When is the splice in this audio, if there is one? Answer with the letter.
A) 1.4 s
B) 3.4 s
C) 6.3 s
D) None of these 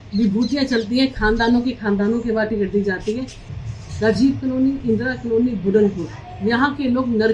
B